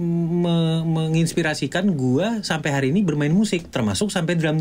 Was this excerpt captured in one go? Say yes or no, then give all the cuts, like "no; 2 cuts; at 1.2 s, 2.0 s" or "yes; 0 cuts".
yes; 0 cuts